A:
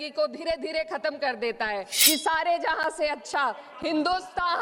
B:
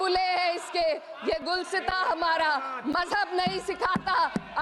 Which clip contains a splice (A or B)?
A